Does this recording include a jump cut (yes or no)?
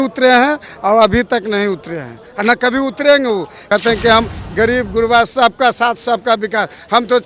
yes